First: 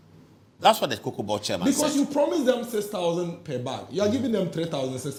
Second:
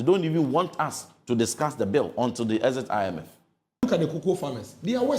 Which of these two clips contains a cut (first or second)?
second